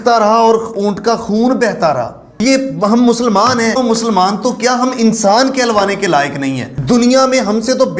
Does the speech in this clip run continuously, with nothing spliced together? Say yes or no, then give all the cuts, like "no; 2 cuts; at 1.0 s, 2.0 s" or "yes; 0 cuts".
no; 3 cuts; at 2.2 s, 3.8 s, 6.7 s